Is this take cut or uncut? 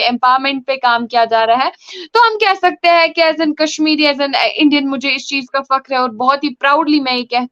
uncut